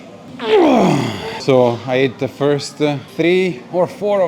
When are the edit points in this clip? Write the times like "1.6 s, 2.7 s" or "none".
1.4 s, 3.0 s